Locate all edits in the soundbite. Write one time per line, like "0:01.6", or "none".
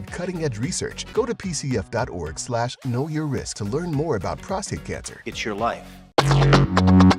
0:01.0
0:03.5
0:05.1
0:06.2